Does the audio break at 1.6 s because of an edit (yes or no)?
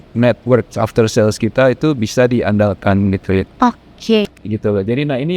no